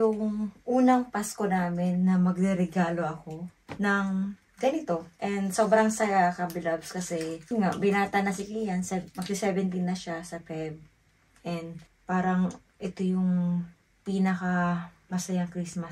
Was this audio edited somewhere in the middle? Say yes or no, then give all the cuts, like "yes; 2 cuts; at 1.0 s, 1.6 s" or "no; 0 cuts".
no; 0 cuts